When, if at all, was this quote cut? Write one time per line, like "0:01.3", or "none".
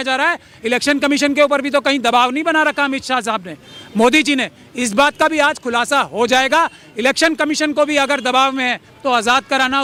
none

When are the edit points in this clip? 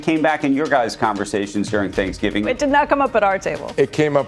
0:02.5

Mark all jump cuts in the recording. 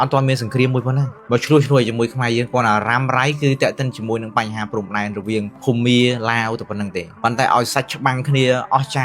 0:05.6
0:07.1

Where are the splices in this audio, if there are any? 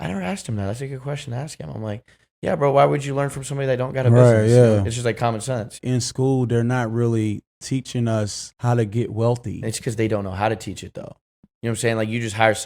0:05.8
0:08.4
0:09.6

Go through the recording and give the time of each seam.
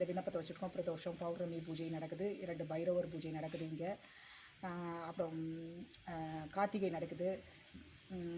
none

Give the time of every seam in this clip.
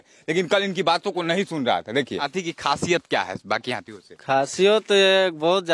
0:02.3

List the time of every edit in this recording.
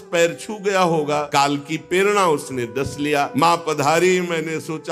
0:01.3
0:03.3

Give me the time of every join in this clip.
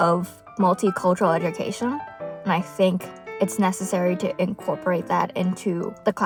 none

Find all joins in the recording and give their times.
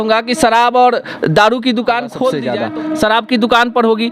0:02.5

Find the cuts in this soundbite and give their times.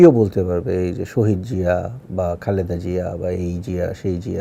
none

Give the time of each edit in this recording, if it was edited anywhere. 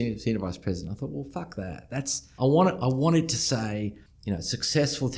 0:02.3
0:04.1

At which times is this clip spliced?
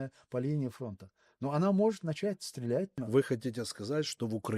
0:03.0

